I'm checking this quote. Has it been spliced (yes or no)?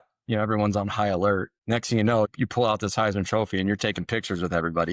yes